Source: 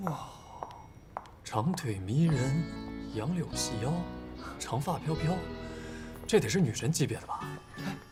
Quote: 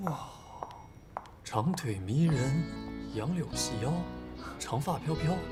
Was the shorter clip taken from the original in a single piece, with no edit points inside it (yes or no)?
yes